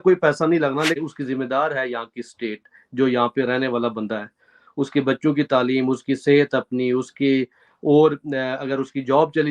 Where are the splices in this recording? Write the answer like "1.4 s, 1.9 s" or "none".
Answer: 1.0 s

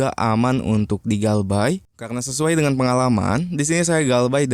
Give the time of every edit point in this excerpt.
1.9 s

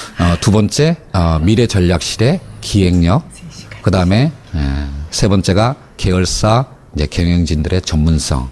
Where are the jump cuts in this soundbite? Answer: none

